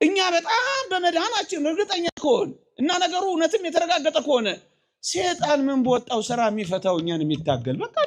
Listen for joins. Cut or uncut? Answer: uncut